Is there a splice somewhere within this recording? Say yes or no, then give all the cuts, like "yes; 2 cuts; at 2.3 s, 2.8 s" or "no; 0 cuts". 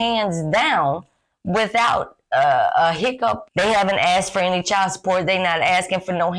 yes; 1 cut; at 3.5 s